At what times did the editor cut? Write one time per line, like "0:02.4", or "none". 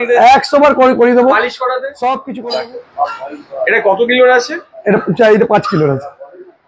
0:02.3